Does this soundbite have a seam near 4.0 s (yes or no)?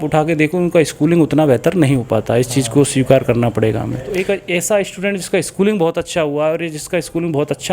yes